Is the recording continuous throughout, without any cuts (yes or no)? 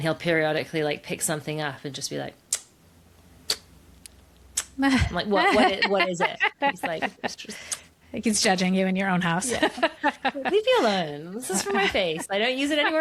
yes